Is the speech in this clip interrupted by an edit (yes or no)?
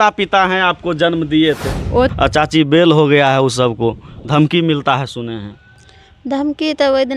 yes